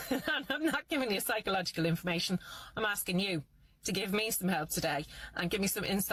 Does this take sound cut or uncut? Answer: uncut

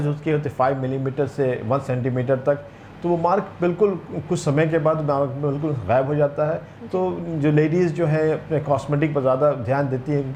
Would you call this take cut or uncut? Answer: uncut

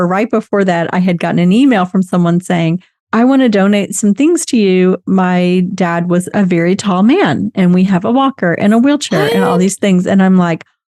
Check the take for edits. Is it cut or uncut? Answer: uncut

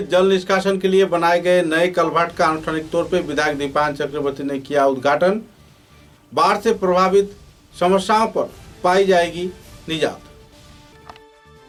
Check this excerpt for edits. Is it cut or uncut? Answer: uncut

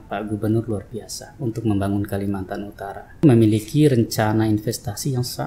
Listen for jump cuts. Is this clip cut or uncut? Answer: cut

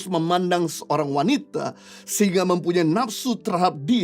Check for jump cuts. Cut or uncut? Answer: uncut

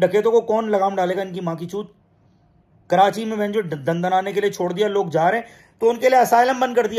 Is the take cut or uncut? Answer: uncut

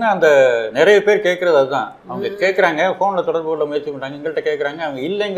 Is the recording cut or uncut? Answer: uncut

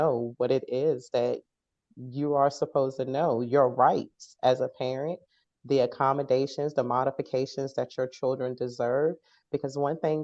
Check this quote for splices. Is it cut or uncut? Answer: uncut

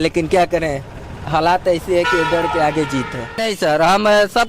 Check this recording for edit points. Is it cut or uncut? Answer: cut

